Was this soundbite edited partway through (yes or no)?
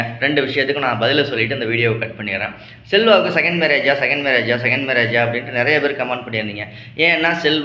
no